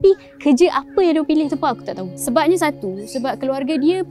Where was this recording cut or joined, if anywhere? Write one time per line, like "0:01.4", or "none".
0:02.1